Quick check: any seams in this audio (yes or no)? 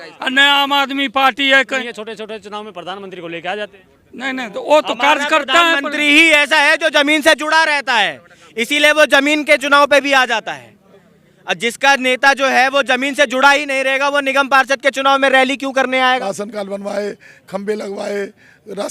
yes